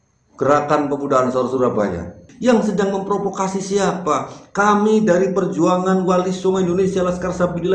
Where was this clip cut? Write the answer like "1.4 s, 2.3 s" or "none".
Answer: 2.2 s